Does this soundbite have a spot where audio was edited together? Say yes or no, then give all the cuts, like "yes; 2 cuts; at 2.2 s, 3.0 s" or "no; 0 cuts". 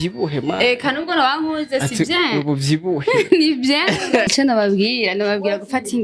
yes; 1 cut; at 4.3 s